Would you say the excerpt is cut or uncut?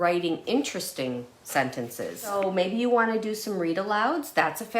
cut